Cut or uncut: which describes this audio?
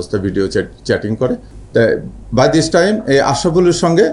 uncut